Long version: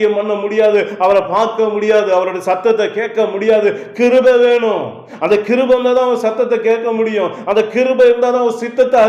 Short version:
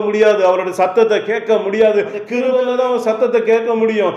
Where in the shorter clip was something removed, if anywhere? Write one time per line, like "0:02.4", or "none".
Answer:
0:02.4